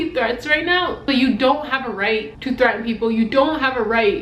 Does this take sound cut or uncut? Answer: cut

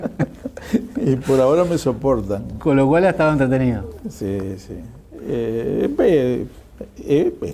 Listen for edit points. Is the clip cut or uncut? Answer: cut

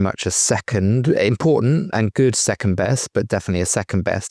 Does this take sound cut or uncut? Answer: uncut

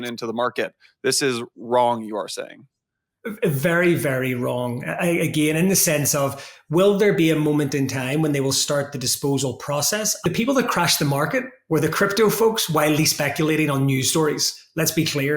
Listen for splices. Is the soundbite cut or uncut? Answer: cut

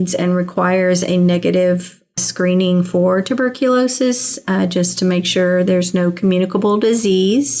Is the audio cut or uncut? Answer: cut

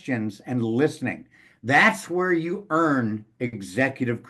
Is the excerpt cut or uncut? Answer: uncut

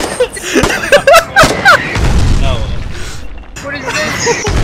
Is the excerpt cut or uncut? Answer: cut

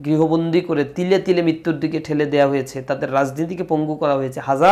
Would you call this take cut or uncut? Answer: uncut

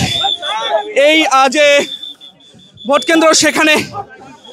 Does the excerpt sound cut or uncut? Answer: uncut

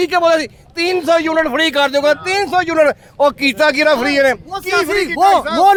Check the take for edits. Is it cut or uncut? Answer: uncut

